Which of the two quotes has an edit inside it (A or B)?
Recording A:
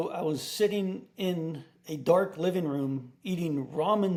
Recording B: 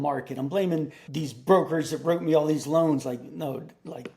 B